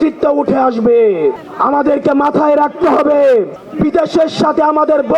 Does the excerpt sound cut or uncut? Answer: cut